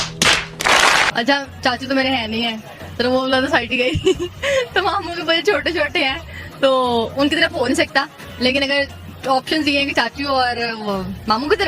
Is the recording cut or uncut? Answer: cut